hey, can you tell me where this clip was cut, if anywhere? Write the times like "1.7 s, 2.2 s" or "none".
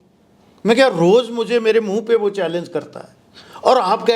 none